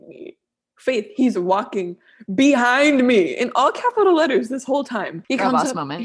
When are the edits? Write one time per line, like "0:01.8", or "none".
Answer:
0:05.1